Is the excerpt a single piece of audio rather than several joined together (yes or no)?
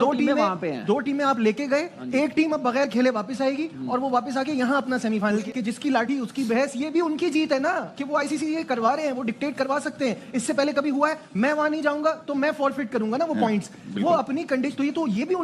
yes